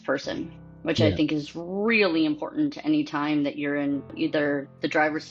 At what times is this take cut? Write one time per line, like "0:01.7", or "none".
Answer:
0:04.1